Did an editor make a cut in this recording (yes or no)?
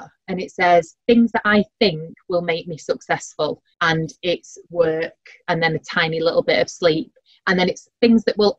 yes